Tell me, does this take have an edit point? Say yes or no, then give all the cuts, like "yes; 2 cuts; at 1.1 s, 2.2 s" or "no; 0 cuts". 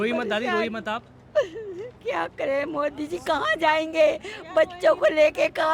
no; 0 cuts